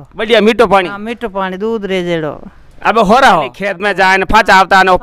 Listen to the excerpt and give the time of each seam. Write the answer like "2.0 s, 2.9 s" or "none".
3.7 s

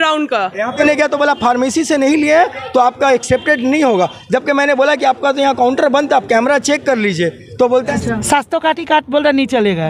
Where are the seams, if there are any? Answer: 0.8 s, 7.9 s

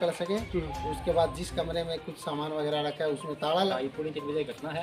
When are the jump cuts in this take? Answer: 3.7 s

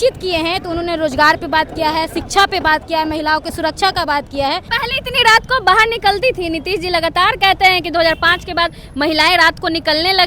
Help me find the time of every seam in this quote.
4.7 s

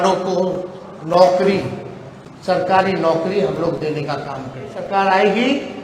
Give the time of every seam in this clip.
4.8 s

